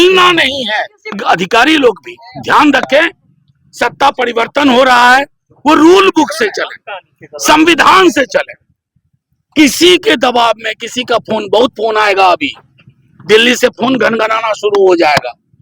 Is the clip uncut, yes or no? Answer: no